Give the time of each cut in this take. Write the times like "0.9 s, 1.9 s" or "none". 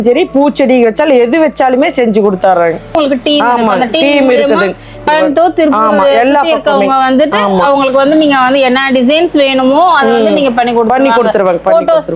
3.0 s, 5.0 s